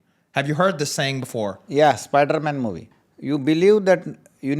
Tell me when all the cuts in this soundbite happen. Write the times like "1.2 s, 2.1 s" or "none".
2.8 s